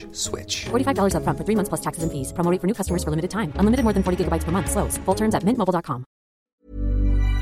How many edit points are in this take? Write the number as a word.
one